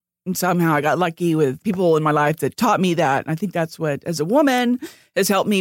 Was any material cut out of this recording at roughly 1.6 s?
yes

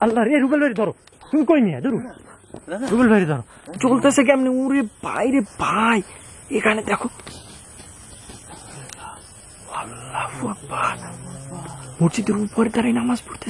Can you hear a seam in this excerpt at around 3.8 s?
yes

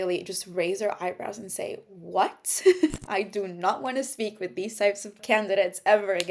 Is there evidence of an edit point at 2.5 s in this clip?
no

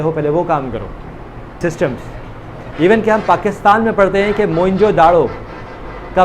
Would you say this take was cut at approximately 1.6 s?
yes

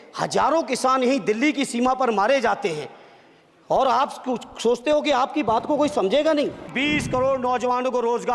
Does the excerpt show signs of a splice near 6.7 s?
yes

